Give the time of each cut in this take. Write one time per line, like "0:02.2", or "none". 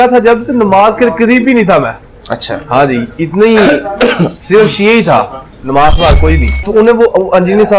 0:06.5

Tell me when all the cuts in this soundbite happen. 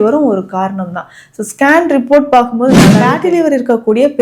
0:03.1

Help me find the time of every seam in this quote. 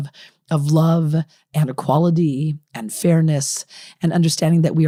none

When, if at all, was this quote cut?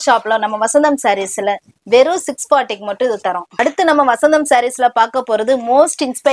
0:03.5

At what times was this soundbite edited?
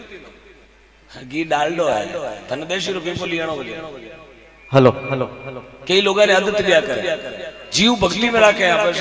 none

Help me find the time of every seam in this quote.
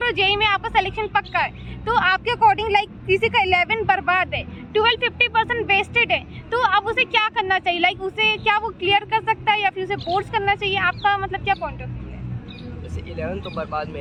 none

